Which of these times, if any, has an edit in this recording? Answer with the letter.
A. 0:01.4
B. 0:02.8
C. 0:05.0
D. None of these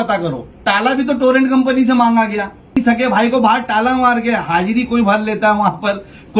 B